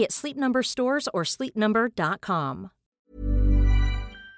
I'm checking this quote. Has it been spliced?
yes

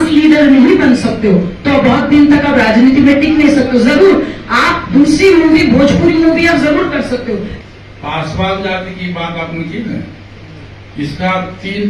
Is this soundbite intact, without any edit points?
no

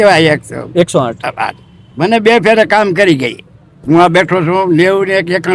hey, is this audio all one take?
yes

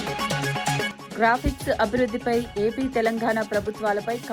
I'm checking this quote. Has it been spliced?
yes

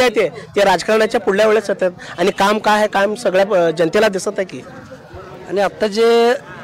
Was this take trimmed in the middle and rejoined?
no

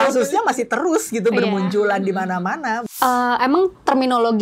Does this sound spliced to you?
yes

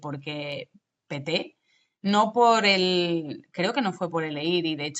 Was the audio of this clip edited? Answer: no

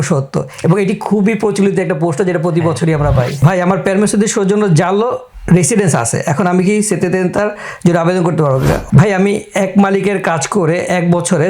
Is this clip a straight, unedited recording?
no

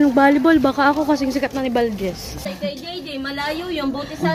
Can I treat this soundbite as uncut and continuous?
no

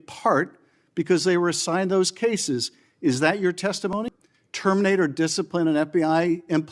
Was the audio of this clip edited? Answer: yes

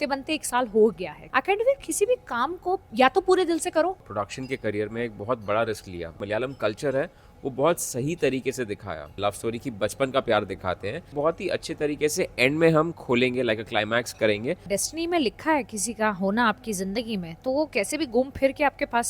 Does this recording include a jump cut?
yes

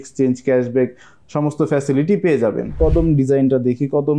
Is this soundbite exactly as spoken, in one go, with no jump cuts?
no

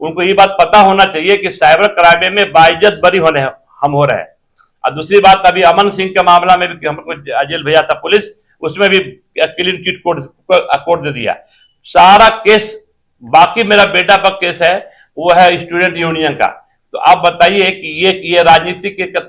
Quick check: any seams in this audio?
no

